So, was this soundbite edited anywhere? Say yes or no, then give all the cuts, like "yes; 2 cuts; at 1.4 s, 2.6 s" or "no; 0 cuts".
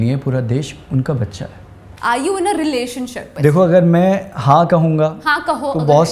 yes; 2 cuts; at 1.9 s, 3.3 s